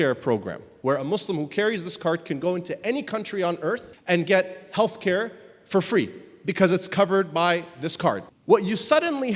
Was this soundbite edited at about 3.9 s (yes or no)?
yes